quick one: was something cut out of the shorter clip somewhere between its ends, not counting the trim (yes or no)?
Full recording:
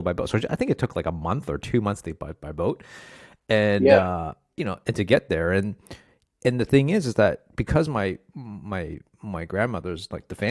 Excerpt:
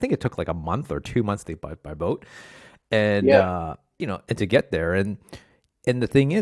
no